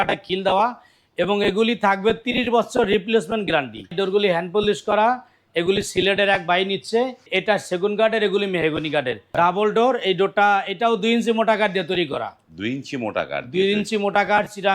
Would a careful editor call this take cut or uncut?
cut